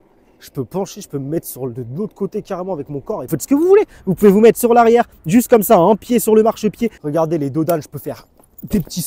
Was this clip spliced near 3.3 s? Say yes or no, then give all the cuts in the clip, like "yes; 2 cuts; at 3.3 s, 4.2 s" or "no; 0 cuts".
yes; 2 cuts; at 3.3 s, 6.9 s